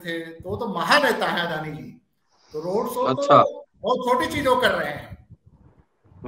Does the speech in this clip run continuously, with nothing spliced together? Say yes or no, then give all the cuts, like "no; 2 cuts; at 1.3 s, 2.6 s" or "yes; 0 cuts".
yes; 0 cuts